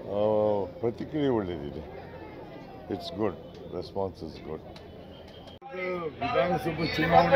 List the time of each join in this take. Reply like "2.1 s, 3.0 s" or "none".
5.8 s